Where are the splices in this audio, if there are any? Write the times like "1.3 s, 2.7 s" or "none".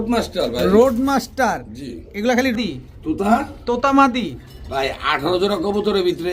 2.5 s